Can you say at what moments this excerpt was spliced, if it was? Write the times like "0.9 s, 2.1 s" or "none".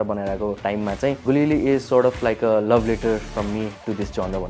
1.0 s